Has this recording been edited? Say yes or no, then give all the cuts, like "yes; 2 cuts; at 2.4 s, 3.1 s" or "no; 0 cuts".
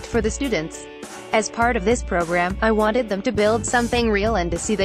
yes; 1 cut; at 1.0 s